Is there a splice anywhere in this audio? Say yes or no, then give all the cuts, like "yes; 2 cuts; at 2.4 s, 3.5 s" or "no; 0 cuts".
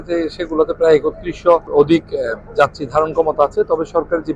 yes; 1 cut; at 1.7 s